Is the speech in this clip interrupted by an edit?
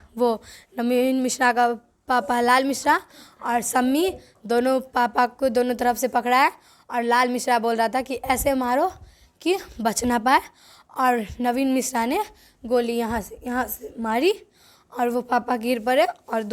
no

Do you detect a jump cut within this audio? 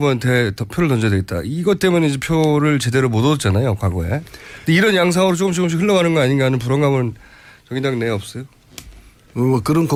no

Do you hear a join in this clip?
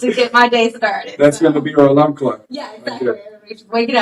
no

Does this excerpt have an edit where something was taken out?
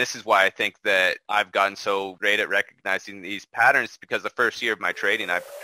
yes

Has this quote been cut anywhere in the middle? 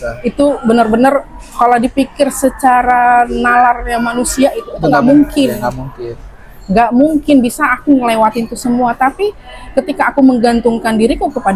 no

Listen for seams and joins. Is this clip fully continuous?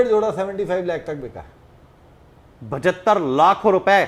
yes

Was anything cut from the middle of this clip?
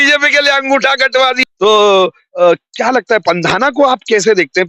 yes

